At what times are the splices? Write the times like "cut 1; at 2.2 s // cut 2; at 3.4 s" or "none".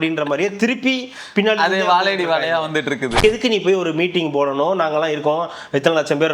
cut 1; at 3.1 s